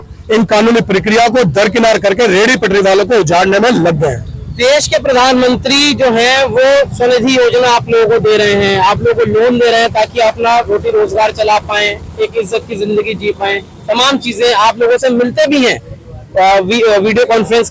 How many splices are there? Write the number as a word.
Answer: zero